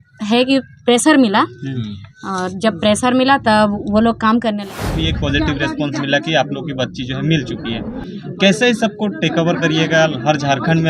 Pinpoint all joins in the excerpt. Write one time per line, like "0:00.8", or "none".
0:04.9